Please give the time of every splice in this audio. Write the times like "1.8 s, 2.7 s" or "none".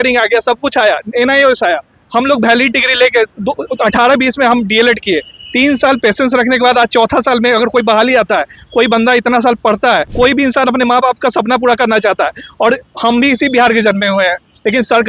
3.4 s, 10.1 s

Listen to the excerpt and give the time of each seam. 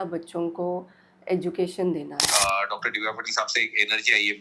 2.2 s

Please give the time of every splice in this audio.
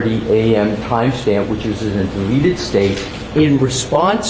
none

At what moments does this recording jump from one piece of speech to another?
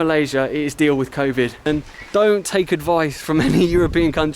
1.6 s

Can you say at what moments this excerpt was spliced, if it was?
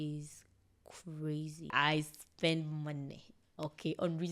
1.7 s

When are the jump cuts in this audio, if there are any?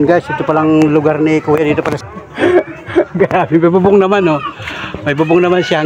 2.0 s

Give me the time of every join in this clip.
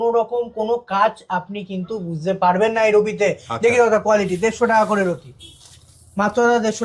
none

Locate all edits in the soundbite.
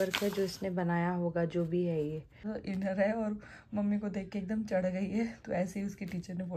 2.5 s

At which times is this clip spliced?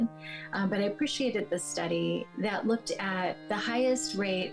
2.3 s, 3.4 s

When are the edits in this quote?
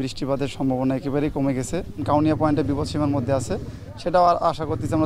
2.0 s

